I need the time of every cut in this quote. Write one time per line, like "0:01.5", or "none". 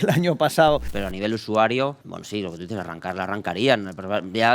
0:01.0
0:02.1